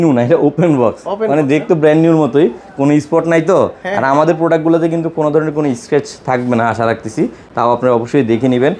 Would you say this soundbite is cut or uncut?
uncut